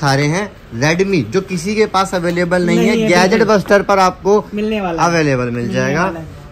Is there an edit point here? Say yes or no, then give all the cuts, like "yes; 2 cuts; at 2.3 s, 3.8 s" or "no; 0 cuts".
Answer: no; 0 cuts